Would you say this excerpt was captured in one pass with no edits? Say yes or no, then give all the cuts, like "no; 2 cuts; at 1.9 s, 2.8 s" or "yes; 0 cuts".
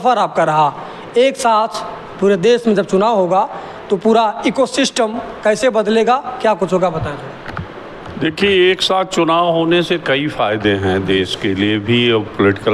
yes; 0 cuts